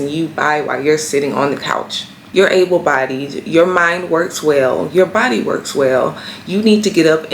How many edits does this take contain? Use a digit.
1